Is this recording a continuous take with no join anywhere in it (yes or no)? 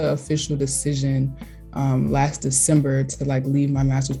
yes